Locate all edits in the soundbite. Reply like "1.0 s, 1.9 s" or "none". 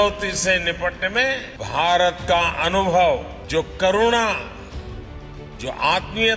1.5 s, 3.4 s